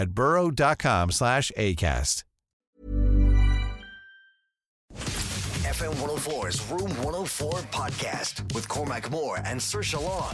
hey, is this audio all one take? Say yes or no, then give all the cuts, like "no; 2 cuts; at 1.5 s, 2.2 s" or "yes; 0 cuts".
no; 1 cut; at 4.9 s